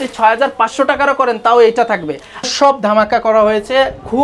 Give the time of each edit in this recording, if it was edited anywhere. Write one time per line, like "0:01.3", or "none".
0:02.5